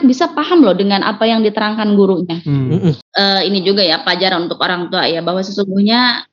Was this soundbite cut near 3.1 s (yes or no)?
yes